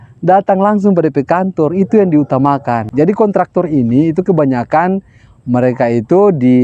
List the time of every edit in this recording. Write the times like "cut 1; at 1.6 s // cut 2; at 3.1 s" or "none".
cut 1; at 2.8 s